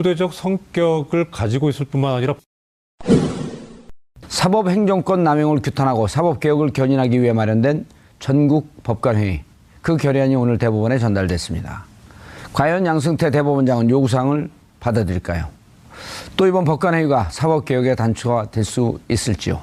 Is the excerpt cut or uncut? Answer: cut